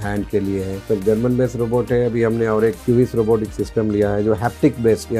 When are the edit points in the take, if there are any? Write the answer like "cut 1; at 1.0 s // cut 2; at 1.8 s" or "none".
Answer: cut 1; at 0.8 s // cut 2; at 2.8 s